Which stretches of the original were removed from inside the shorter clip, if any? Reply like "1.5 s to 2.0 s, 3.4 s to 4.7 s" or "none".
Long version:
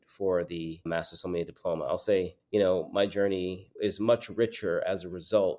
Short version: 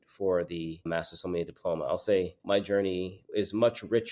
2.4 s to 2.9 s